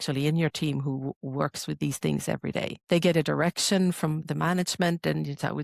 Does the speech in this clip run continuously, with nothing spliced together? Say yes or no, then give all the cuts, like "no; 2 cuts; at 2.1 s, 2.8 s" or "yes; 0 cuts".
no; 2 cuts; at 2.8 s, 4.2 s